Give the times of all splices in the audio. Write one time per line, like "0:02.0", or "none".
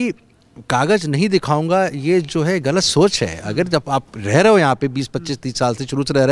none